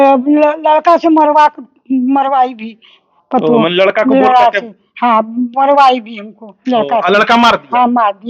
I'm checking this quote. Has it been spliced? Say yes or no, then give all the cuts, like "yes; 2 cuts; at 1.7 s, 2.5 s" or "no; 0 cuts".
no; 0 cuts